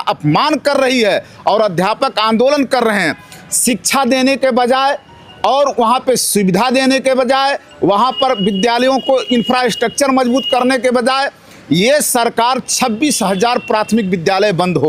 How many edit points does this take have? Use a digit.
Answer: 0